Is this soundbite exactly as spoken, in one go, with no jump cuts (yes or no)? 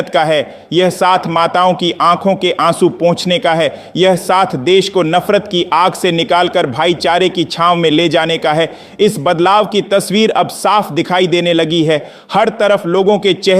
no